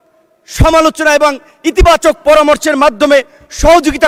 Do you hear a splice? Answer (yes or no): no